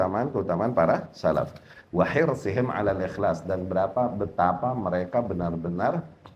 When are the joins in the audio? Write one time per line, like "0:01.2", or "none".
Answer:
none